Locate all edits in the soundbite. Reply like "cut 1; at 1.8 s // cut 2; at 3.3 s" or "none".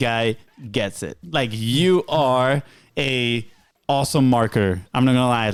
none